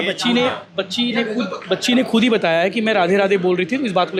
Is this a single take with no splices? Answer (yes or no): yes